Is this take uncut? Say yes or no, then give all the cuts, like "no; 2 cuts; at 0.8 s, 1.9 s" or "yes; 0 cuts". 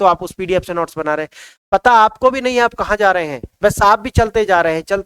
yes; 0 cuts